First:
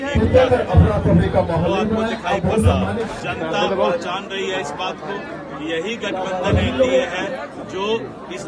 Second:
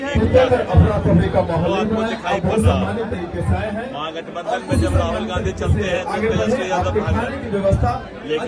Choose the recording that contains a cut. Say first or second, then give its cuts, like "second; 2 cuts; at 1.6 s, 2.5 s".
first; 1 cut; at 3.1 s